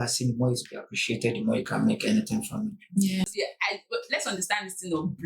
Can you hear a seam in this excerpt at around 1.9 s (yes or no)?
no